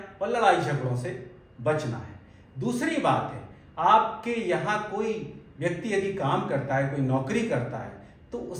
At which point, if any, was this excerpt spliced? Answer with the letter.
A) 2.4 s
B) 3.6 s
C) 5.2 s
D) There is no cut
D